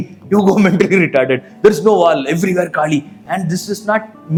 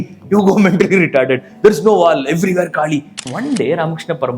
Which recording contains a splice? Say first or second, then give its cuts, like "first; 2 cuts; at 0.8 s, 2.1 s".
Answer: second; 1 cut; at 3.2 s